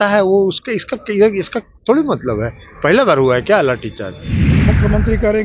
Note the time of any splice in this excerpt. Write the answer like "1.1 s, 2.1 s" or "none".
4.5 s